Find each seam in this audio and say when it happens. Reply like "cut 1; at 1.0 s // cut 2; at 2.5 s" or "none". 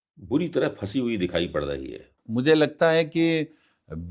cut 1; at 2.1 s

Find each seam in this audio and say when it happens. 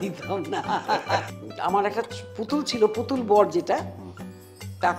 cut 1; at 1.2 s

